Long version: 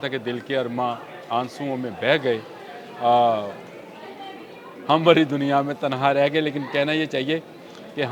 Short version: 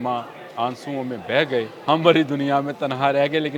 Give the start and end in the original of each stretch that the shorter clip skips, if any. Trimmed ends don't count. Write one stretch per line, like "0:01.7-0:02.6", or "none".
0:02.5-0:04.8